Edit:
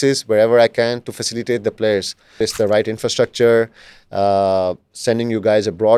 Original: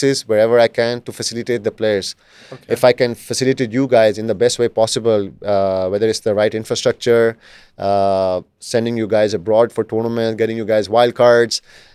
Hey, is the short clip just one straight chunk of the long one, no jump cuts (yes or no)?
no